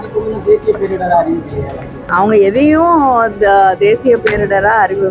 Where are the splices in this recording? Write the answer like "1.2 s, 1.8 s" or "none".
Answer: 1.9 s